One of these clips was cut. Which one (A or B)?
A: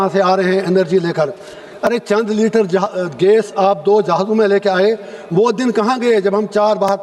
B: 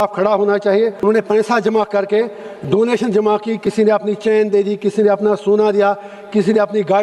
B